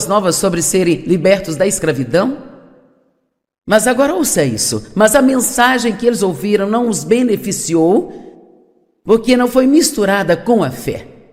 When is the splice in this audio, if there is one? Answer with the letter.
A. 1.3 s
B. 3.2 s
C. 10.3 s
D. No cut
C